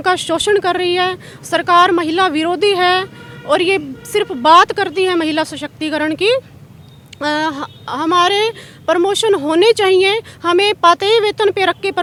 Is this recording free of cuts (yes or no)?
yes